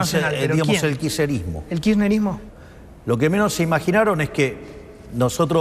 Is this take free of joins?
yes; 0 cuts

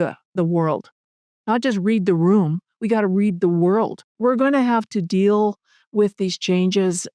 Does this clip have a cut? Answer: yes; 1 cut; at 4.1 s

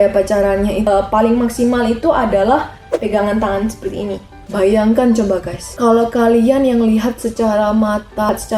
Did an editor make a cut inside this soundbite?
yes; 1 cut; at 4.4 s

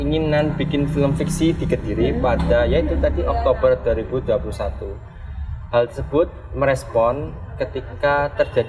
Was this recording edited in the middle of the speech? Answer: no; 0 cuts

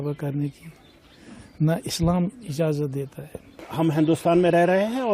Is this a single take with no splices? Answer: no; 1 cut; at 3.6 s

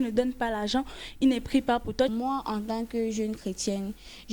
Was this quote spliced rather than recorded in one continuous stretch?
yes; 1 cut; at 2.1 s

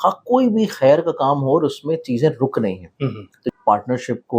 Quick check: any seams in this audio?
yes; 1 cut; at 3.4 s

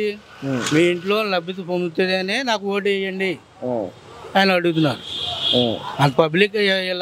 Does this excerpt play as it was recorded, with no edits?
yes; 0 cuts

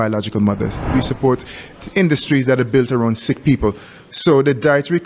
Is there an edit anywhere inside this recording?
yes; 1 cut; at 0.9 s

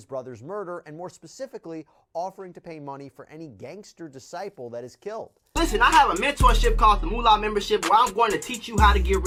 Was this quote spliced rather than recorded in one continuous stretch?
no; 0 cuts

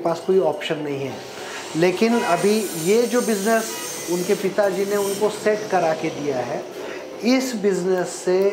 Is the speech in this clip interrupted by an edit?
no; 0 cuts

